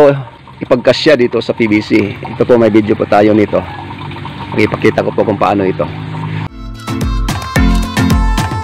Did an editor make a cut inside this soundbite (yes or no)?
no